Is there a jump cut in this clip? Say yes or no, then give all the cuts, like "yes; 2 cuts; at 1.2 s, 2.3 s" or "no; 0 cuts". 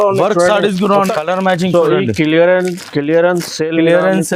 yes; 1 cut; at 1.0 s